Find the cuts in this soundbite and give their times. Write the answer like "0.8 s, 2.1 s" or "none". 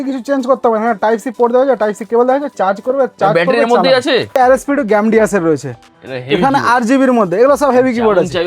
4.3 s